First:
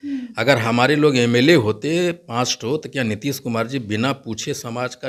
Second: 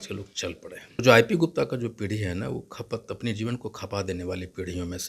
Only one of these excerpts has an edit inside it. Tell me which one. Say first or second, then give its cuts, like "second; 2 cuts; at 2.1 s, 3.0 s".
second; 1 cut; at 1.0 s